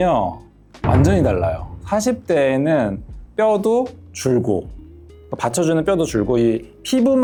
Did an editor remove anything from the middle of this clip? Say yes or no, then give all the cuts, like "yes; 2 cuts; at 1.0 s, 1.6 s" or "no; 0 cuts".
no; 0 cuts